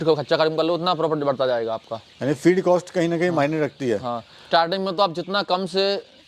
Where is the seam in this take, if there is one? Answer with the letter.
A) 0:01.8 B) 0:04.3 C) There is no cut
B